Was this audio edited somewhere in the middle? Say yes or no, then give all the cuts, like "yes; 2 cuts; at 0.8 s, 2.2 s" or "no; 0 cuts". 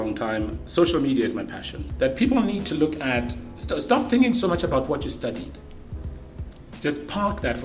yes; 1 cut; at 1.8 s